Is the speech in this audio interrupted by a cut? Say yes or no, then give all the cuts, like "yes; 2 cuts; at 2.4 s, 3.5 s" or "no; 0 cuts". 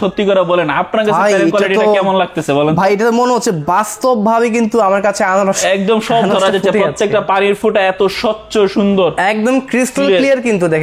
no; 0 cuts